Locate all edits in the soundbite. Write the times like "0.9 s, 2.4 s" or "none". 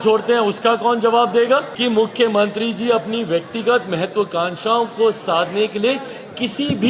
1.7 s